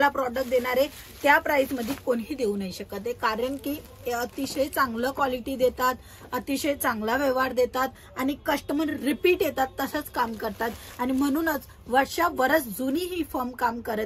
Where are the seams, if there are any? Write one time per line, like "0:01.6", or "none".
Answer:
none